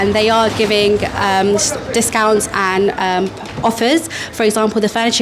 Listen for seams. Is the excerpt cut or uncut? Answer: uncut